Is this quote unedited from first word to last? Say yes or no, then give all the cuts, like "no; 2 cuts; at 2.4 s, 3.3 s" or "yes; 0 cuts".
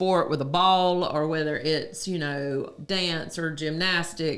yes; 0 cuts